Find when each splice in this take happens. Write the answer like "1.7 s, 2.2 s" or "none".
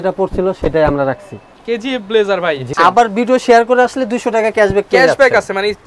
2.7 s